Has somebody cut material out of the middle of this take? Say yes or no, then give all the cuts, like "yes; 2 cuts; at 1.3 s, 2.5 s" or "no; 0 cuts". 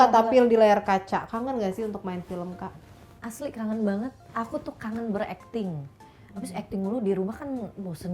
no; 0 cuts